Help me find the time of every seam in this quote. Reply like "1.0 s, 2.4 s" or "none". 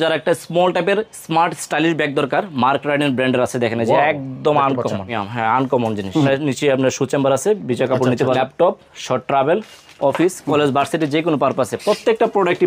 5.2 s, 6.2 s, 8.4 s